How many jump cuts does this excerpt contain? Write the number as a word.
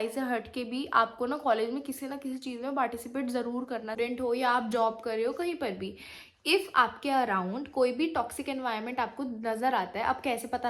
one